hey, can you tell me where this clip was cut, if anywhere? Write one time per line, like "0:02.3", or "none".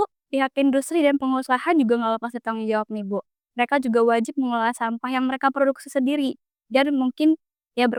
none